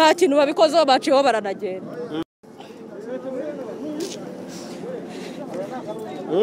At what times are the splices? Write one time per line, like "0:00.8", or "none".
0:02.2